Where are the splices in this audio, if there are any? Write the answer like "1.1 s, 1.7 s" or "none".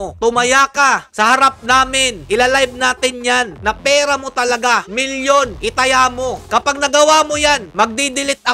none